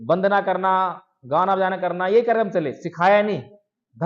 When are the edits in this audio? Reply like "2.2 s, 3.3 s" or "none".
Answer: none